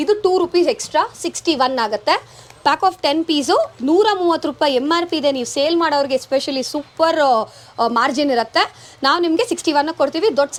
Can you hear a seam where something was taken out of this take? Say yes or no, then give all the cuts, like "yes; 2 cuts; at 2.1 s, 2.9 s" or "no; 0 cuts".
no; 0 cuts